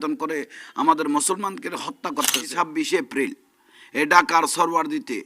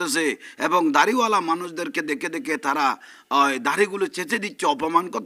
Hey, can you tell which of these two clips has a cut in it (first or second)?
first